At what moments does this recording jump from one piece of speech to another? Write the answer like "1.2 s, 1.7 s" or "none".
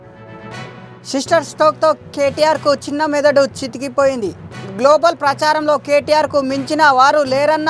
none